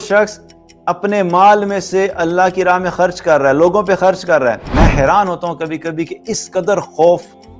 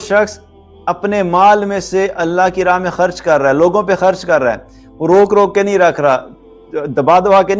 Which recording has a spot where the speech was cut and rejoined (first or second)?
first